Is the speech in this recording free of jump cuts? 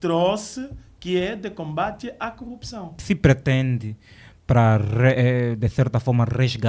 no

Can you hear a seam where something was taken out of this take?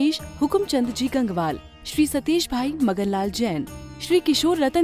no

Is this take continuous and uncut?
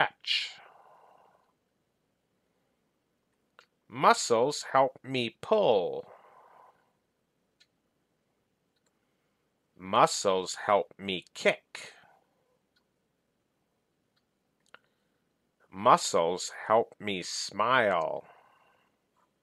no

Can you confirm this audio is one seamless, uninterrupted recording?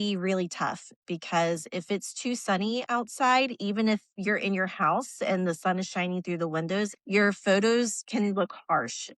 no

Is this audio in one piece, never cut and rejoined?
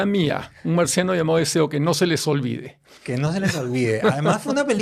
yes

